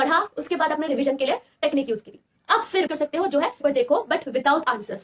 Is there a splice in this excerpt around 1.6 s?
no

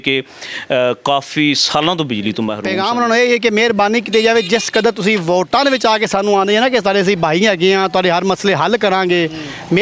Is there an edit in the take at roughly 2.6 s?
yes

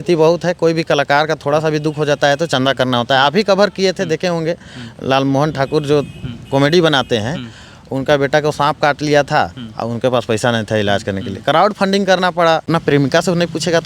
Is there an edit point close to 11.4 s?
no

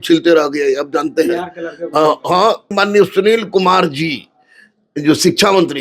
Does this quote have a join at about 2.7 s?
yes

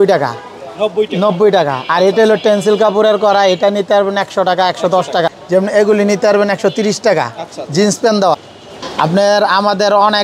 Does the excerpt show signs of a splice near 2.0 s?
no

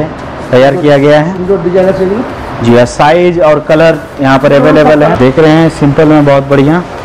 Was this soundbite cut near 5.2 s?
yes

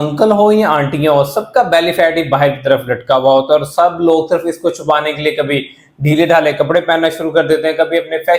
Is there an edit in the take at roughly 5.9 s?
no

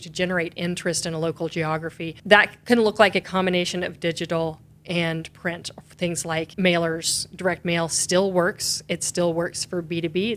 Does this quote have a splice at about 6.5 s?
yes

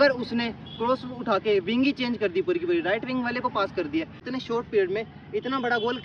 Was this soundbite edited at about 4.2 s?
yes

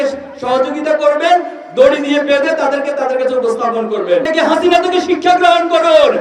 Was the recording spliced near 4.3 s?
yes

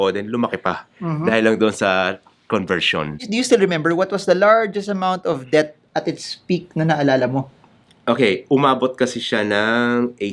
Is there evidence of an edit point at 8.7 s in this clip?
no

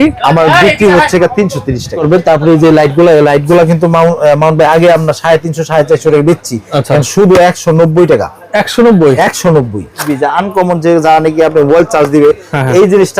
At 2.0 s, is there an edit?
yes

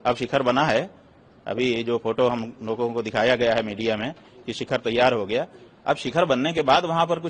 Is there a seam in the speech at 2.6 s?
no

